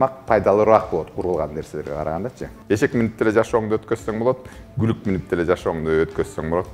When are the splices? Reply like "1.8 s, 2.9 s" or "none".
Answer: 2.4 s